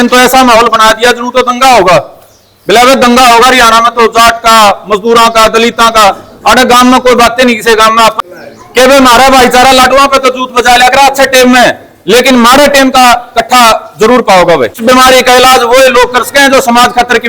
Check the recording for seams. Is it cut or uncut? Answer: cut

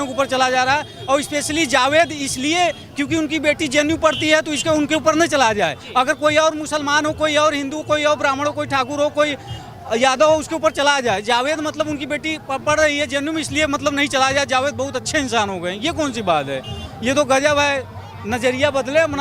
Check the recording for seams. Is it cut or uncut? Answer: uncut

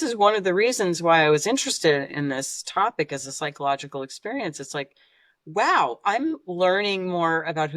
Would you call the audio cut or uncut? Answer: uncut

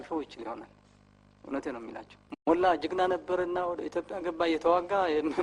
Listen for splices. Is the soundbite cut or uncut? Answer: cut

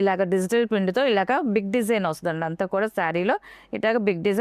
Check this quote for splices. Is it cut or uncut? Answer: uncut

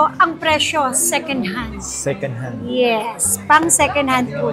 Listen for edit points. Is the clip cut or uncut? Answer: uncut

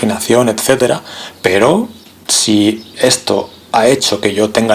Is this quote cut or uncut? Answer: uncut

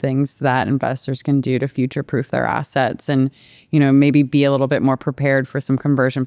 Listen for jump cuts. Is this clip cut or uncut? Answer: uncut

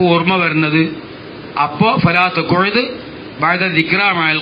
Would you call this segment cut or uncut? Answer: uncut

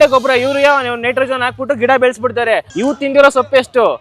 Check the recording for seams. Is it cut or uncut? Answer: cut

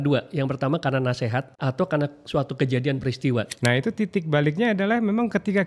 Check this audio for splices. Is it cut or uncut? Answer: cut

